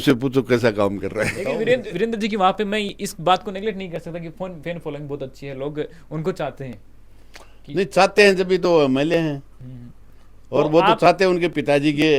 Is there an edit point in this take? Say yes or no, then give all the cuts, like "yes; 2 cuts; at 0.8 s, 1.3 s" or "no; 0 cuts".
yes; 1 cut; at 1.4 s